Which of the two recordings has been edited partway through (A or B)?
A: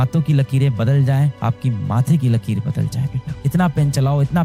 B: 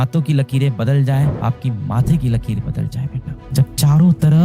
B